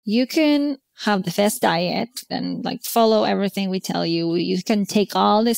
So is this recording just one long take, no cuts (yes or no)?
no